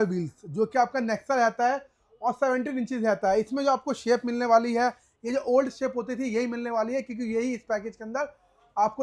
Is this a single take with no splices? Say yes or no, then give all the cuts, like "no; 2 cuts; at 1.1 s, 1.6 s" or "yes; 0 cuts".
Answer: yes; 0 cuts